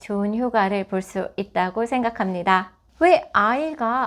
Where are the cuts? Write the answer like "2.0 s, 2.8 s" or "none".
2.8 s